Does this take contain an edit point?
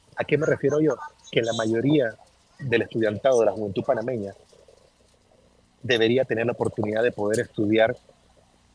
no; 0 cuts

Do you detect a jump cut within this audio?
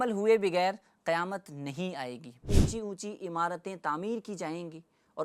yes; 1 cut; at 2.5 s

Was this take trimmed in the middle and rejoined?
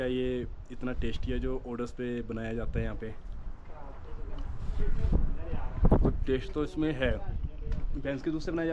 no; 0 cuts

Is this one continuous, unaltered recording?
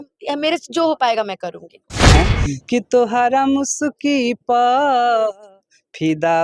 no; 1 cut; at 2.2 s

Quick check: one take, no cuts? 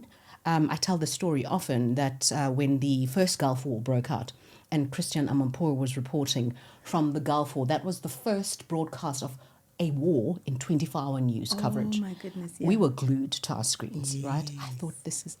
yes; 0 cuts

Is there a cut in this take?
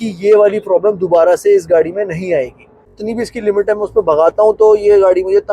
yes; 1 cut; at 2.9 s

